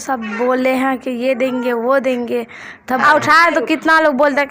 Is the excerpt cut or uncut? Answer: cut